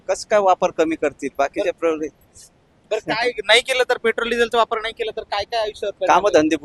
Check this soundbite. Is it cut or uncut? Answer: uncut